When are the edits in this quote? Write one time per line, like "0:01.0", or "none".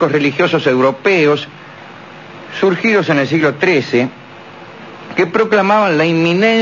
none